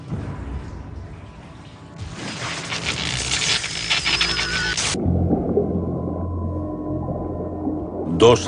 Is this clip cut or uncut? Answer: cut